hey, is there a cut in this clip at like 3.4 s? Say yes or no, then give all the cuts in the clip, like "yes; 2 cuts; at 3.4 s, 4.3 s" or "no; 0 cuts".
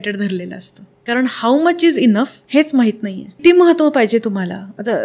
yes; 2 cuts; at 1.0 s, 3.4 s